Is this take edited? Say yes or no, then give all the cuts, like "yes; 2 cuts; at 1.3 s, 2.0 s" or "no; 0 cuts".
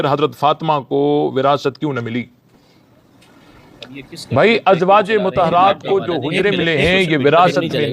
no; 0 cuts